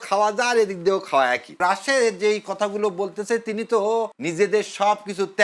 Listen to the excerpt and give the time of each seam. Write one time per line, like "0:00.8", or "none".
0:01.6
0:04.2